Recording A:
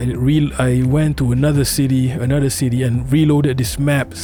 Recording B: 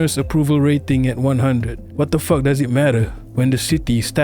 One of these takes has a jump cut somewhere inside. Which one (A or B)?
B